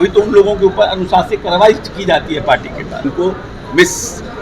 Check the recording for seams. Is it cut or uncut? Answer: cut